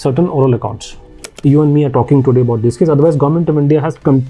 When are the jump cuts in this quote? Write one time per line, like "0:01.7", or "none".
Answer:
0:01.1